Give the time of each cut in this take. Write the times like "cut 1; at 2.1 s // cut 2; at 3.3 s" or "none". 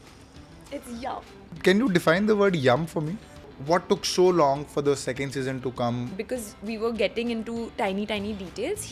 cut 1; at 1.6 s // cut 2; at 3.6 s // cut 3; at 6.1 s